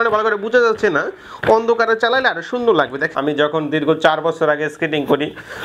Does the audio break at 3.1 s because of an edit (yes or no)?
yes